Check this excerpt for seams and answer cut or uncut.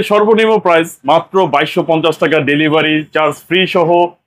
uncut